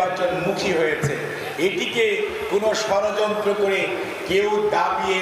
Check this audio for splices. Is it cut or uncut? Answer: uncut